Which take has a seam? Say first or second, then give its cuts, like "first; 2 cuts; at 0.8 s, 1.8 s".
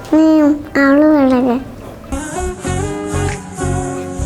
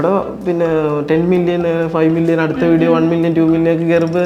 first; 1 cut; at 2.0 s